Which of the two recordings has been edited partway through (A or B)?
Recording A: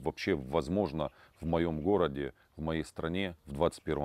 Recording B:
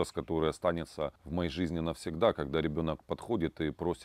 B